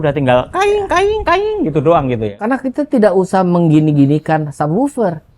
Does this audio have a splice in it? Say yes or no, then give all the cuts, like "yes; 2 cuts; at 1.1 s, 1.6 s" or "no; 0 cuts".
yes; 1 cut; at 2.4 s